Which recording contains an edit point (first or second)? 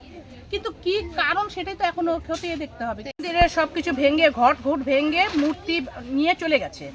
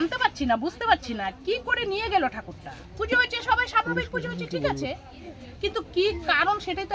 first